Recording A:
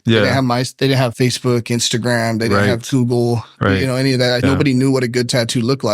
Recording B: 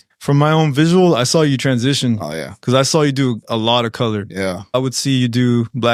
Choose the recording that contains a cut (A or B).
A